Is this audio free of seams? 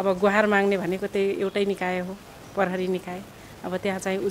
yes; 0 cuts

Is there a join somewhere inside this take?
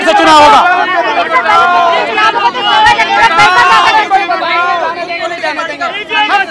no; 0 cuts

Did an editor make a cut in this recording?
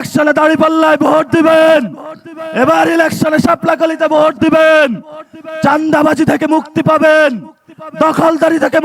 no; 0 cuts

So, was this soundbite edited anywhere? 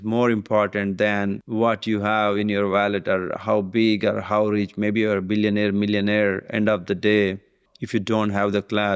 yes; 1 cut; at 1.4 s

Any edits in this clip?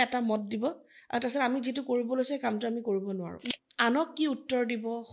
yes; 1 cut; at 3.4 s

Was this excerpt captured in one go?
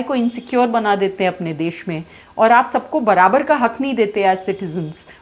yes; 0 cuts

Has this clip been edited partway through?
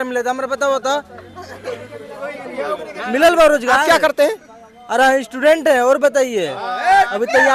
no; 0 cuts

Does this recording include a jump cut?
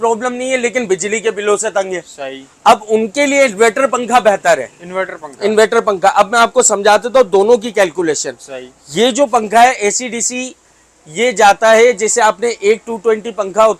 no; 0 cuts

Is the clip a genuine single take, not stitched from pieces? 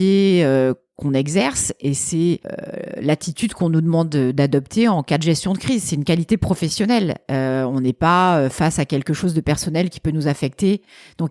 yes; 0 cuts

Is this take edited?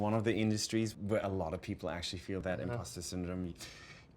yes; 2 cuts; at 0.9 s, 2.4 s

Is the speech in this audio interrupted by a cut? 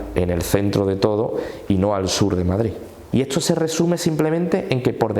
yes; 1 cut; at 3.0 s

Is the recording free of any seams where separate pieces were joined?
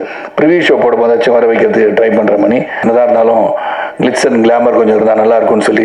no; 1 cut; at 2.8 s

